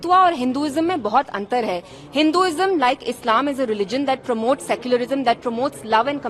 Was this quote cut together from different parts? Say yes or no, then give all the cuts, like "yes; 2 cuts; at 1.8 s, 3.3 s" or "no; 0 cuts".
no; 0 cuts